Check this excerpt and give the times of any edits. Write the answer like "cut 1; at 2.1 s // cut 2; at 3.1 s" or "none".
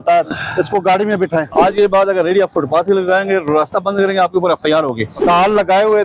cut 1; at 1.5 s // cut 2; at 5.2 s